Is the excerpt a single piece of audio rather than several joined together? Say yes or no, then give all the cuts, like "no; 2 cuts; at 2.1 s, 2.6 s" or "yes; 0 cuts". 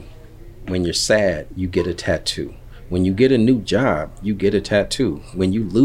yes; 0 cuts